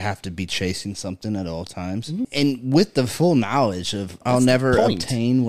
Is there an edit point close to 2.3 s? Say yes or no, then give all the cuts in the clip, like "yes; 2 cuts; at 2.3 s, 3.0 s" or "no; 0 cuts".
yes; 2 cuts; at 2.3 s, 4.2 s